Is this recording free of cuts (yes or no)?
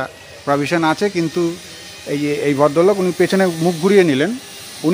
yes